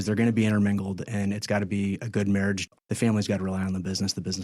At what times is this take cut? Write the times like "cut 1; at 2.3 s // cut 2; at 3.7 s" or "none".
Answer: cut 1; at 2.7 s